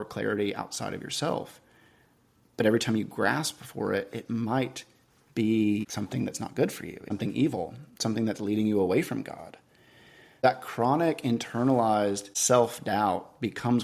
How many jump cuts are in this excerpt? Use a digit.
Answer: 4